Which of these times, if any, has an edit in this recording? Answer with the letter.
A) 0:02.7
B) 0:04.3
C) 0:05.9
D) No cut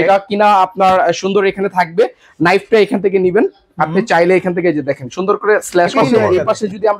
C